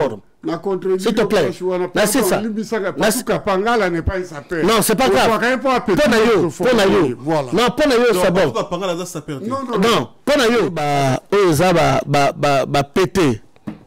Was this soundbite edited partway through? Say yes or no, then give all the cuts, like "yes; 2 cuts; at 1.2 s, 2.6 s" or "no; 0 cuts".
yes; 1 cut; at 10.8 s